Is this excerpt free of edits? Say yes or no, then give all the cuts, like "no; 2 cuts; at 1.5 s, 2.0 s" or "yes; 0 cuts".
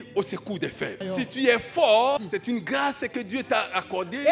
no; 2 cuts; at 1.0 s, 2.2 s